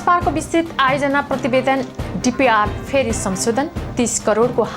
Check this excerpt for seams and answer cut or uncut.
uncut